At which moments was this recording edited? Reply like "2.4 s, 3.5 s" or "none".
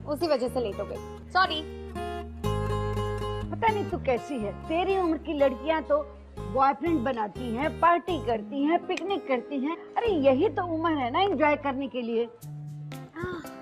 7.7 s